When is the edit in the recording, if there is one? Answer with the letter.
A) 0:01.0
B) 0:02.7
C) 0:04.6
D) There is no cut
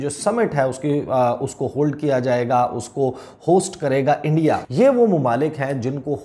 C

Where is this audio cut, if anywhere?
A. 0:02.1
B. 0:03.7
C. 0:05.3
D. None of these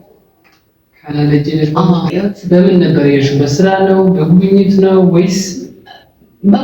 A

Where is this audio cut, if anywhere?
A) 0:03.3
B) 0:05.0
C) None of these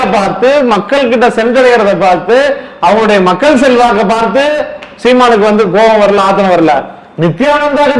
C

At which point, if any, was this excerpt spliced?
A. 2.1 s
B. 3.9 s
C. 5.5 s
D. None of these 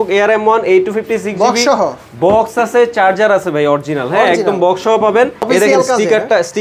C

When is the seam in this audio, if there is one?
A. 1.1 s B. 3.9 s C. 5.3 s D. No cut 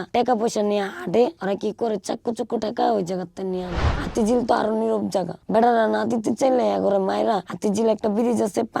B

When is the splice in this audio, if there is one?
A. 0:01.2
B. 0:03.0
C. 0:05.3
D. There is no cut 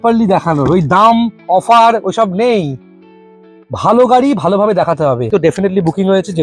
C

